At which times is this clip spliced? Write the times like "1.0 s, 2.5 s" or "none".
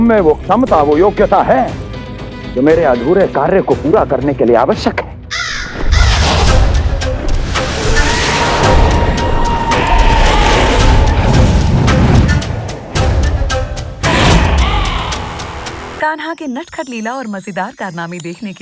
15.8 s

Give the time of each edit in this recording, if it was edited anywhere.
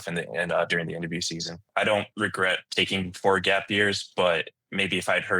1.7 s

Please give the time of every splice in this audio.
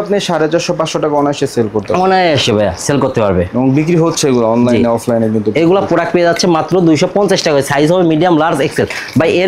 none

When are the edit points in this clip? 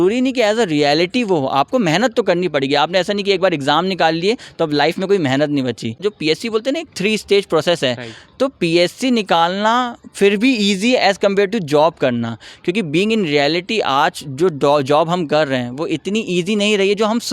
6.0 s

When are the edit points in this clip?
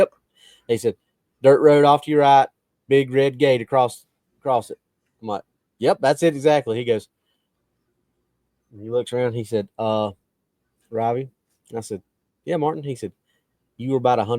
none

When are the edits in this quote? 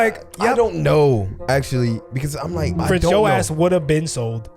2.8 s

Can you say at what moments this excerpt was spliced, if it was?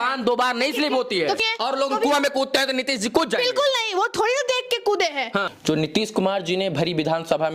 1.4 s, 5.5 s

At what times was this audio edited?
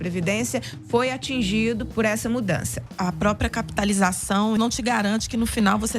1.9 s, 2.8 s, 4.6 s

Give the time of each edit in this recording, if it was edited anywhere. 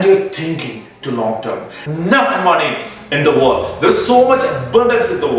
1.9 s

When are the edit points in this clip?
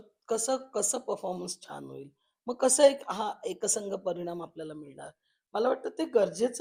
none

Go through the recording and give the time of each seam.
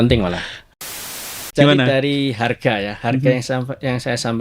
1.2 s

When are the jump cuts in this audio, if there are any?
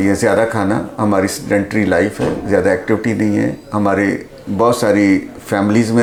none

